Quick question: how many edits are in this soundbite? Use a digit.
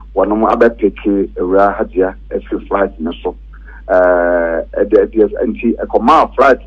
0